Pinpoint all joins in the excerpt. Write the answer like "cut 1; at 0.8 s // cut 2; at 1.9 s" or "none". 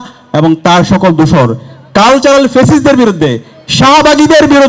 none